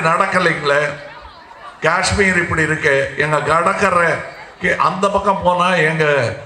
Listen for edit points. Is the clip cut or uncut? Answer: uncut